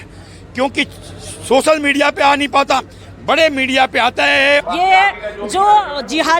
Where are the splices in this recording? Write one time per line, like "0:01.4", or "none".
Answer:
0:04.6